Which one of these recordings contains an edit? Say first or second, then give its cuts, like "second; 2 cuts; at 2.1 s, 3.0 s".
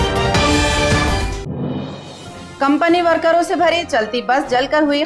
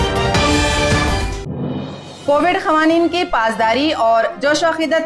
second; 1 cut; at 2.0 s